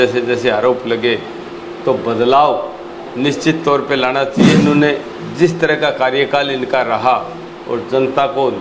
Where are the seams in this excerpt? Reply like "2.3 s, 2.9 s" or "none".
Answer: 4.4 s